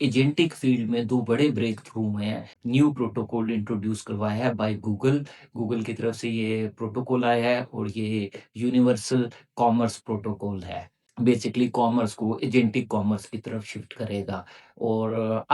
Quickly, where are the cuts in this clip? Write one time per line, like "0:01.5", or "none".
0:02.5
0:11.0